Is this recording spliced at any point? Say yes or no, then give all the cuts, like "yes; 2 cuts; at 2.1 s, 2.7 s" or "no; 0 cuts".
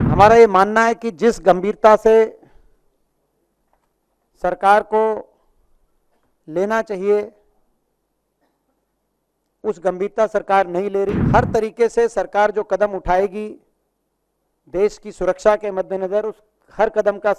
yes; 1 cut; at 11.2 s